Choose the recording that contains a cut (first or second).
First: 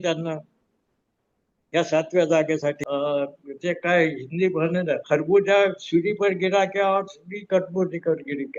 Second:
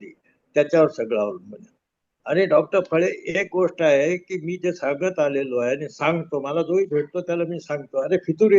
first